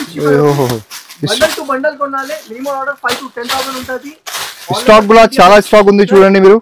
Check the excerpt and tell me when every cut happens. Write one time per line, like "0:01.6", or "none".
none